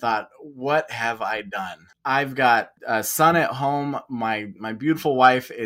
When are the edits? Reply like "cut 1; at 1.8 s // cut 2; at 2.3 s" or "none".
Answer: cut 1; at 1.9 s // cut 2; at 2.8 s

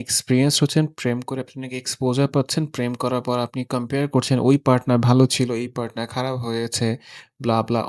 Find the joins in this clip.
none

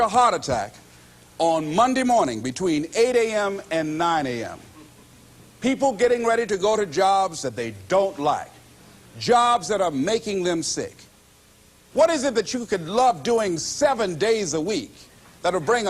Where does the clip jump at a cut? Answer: cut 1; at 11.3 s

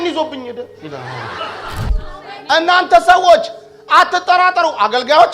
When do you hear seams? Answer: cut 1; at 1.9 s

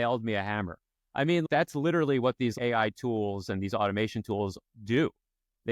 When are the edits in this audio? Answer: cut 1; at 1.4 s // cut 2; at 2.5 s

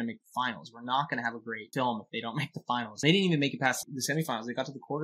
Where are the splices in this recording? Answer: cut 1; at 1.6 s // cut 2; at 2.9 s // cut 3; at 3.9 s

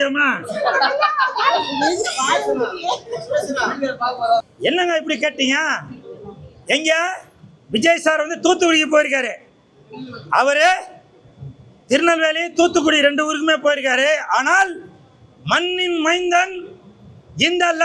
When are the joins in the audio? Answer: cut 1; at 4.4 s

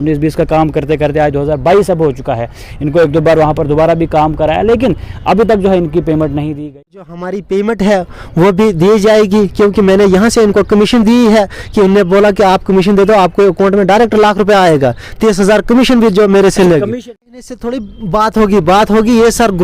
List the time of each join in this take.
cut 1; at 6.5 s // cut 2; at 17.5 s

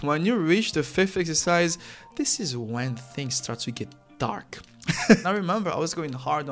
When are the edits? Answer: cut 1; at 5.2 s

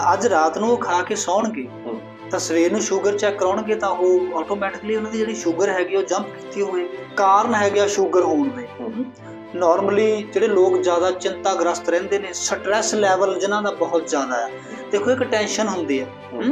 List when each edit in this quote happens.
cut 1; at 7.0 s

